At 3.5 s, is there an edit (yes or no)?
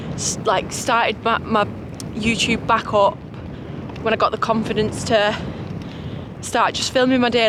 no